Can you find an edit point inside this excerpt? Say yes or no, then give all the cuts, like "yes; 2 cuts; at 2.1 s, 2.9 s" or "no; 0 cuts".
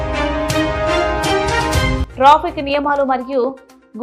yes; 1 cut; at 2.0 s